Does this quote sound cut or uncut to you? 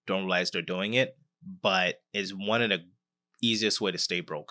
uncut